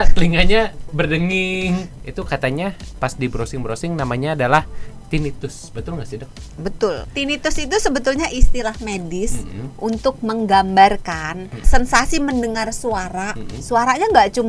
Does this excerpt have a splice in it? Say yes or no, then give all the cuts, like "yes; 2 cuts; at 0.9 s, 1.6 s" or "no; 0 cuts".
yes; 3 cuts; at 1.9 s, 7.1 s, 11.7 s